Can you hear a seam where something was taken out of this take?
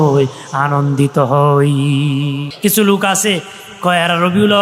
yes; 1 cut; at 2.5 s

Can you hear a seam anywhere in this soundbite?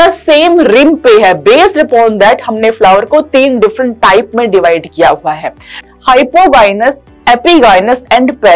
yes; 1 cut; at 5.8 s

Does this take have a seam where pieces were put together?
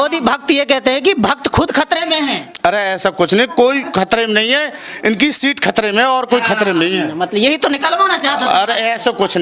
no; 0 cuts

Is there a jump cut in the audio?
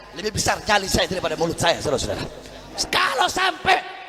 yes; 1 cut; at 2.6 s

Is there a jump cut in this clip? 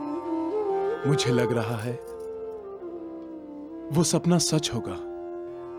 no; 0 cuts

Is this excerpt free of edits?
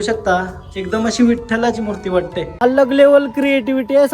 no; 1 cut; at 2.5 s

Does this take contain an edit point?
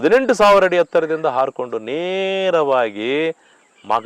no; 0 cuts

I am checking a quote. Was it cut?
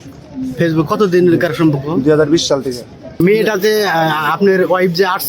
yes; 1 cut; at 3.2 s

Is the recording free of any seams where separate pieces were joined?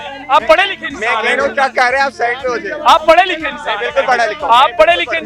yes; 0 cuts

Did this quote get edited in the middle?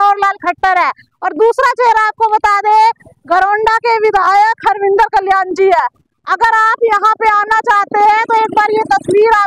no; 0 cuts

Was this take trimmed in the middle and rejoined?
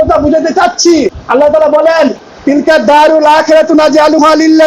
yes; 1 cut; at 1.2 s

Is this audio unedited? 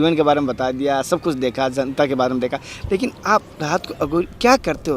yes; 0 cuts

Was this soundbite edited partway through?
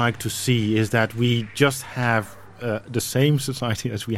no; 0 cuts

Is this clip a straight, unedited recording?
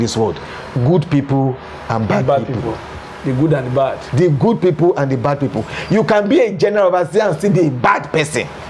yes; 0 cuts

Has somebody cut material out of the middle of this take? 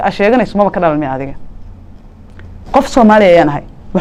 no; 0 cuts

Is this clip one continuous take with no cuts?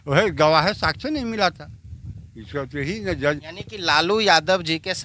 yes; 0 cuts

